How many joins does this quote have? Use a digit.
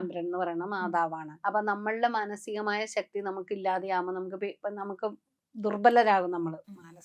1